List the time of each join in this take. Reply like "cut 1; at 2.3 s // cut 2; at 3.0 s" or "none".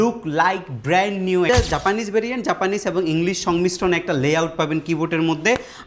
cut 1; at 1.5 s